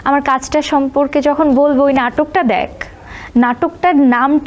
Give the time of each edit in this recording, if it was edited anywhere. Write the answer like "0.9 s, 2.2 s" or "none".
none